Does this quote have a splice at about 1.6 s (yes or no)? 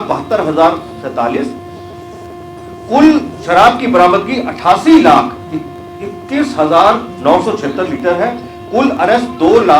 no